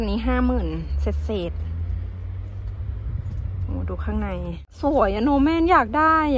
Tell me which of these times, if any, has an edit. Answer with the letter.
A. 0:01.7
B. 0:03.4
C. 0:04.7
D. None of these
C